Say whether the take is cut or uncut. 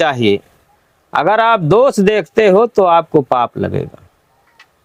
uncut